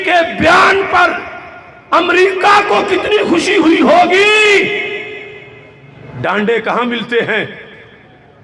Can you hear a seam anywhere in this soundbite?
no; 0 cuts

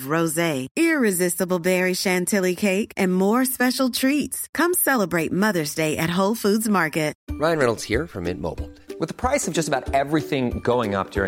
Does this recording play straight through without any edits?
no; 1 cut; at 7.2 s

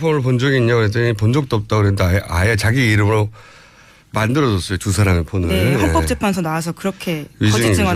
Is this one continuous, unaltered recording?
yes; 0 cuts

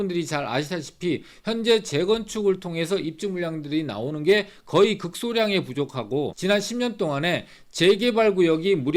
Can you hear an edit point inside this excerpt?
yes; 1 cut; at 6.3 s

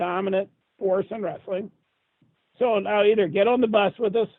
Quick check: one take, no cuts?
no; 1 cut; at 2.2 s

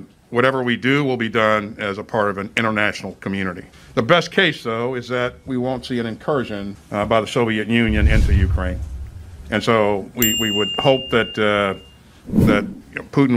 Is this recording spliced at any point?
yes; 1 cut; at 8.9 s

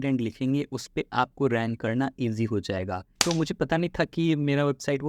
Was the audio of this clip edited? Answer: yes; 1 cut; at 3.4 s

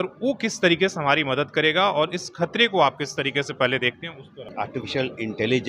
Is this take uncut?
no; 1 cut; at 4.5 s

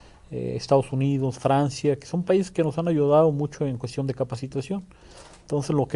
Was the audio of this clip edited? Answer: no; 0 cuts

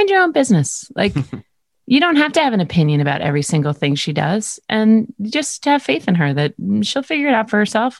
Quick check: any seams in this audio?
no; 0 cuts

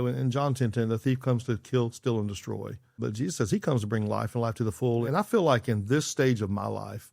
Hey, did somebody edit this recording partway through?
yes; 2 cuts; at 3.0 s, 5.1 s

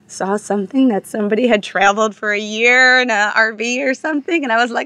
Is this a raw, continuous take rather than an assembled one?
yes; 0 cuts

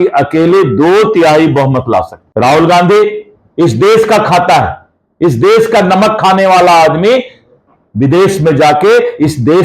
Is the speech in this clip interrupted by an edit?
yes; 1 cut; at 2.2 s

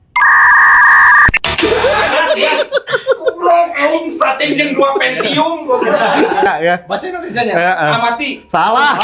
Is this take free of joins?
no; 1 cut; at 6.4 s

